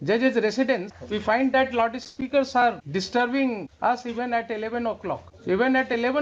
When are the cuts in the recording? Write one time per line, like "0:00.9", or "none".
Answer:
0:00.9
0:02.8
0:03.7
0:05.3

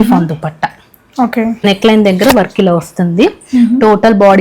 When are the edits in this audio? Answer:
0:01.6

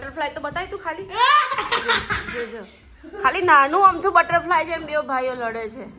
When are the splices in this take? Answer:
none

